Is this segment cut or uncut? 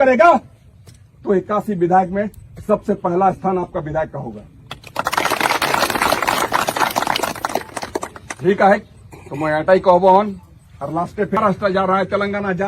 cut